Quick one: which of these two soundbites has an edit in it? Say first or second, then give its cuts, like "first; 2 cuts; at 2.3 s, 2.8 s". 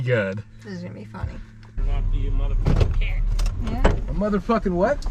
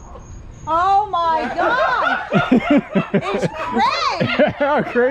first; 1 cut; at 1.8 s